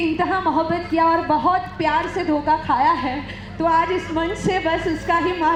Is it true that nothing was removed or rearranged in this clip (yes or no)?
yes